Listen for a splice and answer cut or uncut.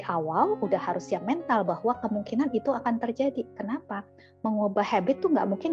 uncut